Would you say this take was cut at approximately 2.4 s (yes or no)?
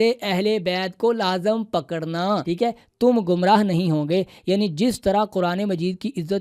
yes